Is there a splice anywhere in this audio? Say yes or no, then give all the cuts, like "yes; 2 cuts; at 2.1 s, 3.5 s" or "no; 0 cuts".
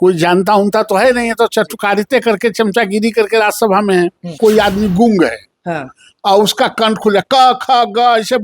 yes; 1 cut; at 4.4 s